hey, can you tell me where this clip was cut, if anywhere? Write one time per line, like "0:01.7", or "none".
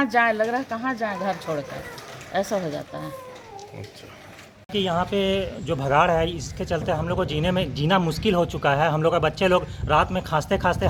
none